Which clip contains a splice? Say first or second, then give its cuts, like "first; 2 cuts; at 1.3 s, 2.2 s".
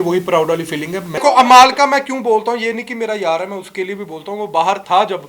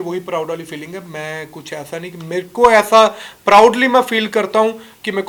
first; 1 cut; at 1.2 s